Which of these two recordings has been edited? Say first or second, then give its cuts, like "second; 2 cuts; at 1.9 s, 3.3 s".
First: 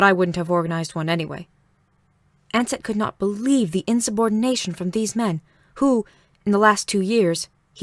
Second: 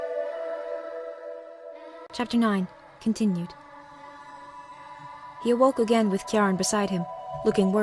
first; 1 cut; at 3.4 s